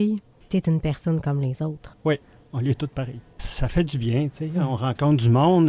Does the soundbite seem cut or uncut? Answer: cut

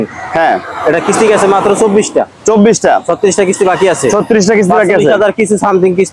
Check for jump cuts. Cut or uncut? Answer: uncut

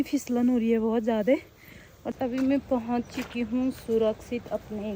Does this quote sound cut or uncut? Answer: cut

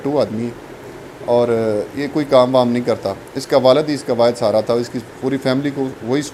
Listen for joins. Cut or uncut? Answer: uncut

